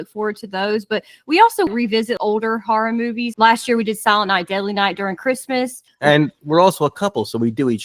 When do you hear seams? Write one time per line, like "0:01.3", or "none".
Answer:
0:01.7
0:03.3